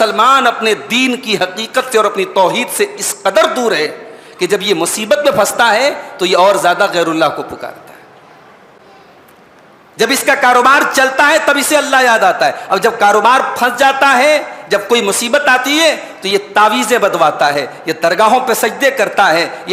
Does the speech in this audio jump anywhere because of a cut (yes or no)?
no